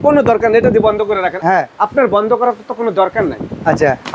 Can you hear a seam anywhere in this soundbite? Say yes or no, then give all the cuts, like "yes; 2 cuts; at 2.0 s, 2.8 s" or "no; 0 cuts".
yes; 1 cut; at 1.3 s